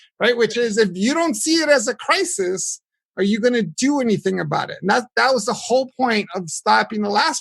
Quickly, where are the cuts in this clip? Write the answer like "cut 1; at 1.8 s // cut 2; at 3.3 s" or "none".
none

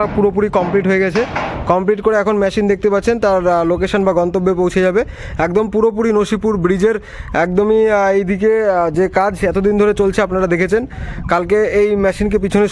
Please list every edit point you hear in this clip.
none

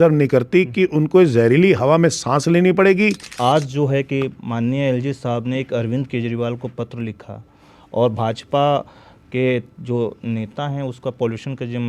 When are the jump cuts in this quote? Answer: cut 1; at 3.3 s

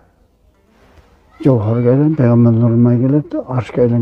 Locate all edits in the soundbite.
none

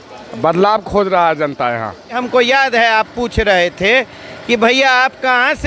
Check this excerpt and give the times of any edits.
cut 1; at 2.2 s

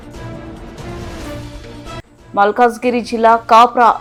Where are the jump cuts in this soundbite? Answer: none

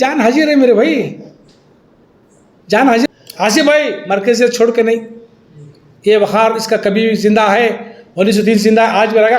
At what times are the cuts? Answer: cut 1; at 3.1 s

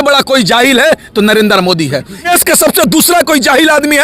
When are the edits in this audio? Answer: cut 1; at 2.1 s

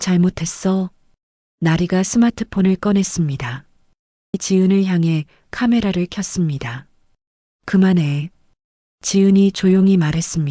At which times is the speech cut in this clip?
cut 1; at 4.4 s

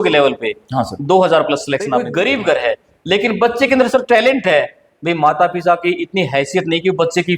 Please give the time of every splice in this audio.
cut 1; at 2.1 s

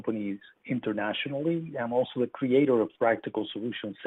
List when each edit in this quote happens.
none

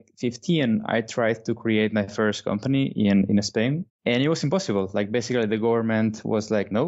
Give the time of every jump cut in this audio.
cut 1; at 3.8 s

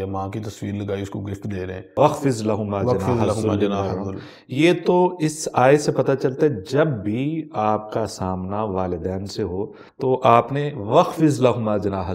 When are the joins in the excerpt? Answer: cut 1; at 1.9 s // cut 2; at 9.8 s

